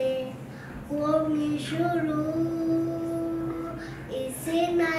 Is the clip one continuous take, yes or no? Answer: yes